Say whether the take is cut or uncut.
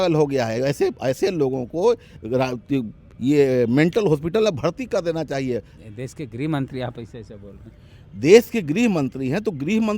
uncut